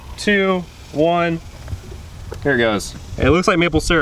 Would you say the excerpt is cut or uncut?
cut